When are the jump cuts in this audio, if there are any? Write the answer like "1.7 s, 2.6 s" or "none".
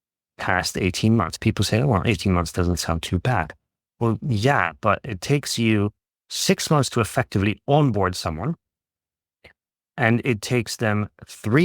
1.3 s